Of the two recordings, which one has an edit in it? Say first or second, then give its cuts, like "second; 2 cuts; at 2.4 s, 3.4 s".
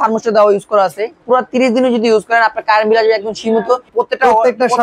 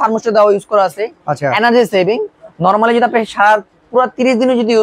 first; 2 cuts; at 1.1 s, 3.9 s